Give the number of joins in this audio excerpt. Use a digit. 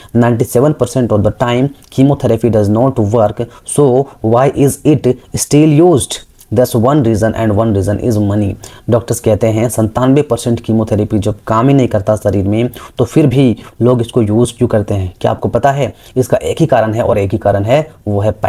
0